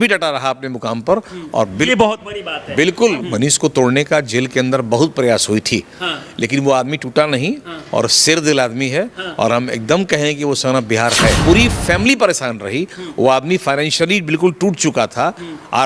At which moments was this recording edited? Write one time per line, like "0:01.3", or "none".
0:03.2
0:11.4